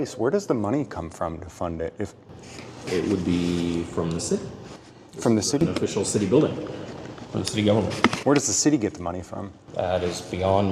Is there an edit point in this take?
no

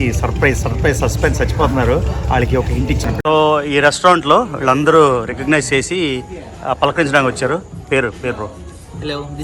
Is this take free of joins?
no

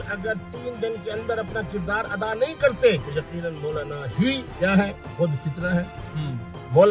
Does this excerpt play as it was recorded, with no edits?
no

